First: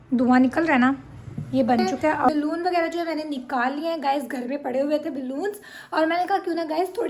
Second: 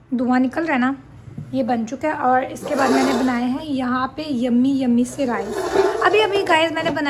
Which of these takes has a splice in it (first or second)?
first